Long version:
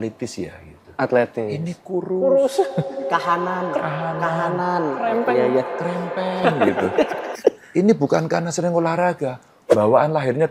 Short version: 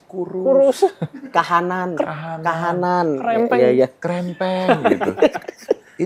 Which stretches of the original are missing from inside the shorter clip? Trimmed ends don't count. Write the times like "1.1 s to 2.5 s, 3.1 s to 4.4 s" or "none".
none